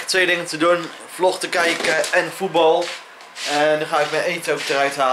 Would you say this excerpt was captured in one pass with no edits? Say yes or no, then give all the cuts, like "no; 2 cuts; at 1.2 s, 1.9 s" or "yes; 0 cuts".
yes; 0 cuts